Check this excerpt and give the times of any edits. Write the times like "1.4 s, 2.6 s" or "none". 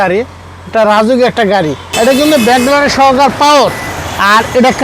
2.1 s